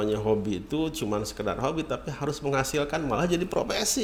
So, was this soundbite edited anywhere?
no; 0 cuts

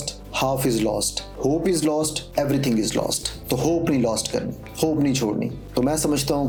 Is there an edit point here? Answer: no; 0 cuts

